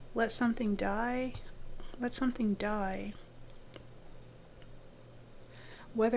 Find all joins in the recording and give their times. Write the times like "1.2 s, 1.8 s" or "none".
none